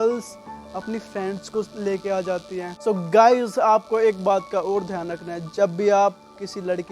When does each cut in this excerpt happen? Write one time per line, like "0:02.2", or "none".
0:02.7